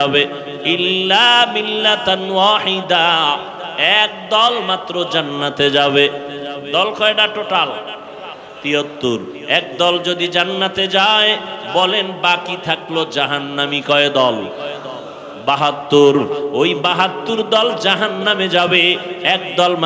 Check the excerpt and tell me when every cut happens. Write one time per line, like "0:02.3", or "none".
none